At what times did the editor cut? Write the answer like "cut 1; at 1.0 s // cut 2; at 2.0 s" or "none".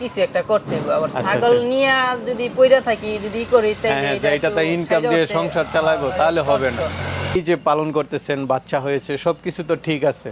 cut 1; at 7.4 s